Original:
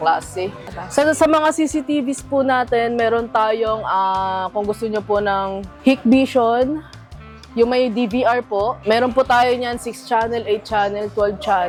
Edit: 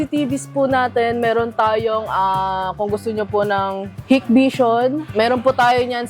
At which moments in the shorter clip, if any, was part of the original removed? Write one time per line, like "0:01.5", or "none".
0:05.1